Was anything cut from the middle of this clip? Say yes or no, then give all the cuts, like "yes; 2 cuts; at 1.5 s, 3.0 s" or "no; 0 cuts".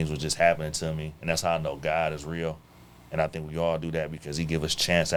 no; 0 cuts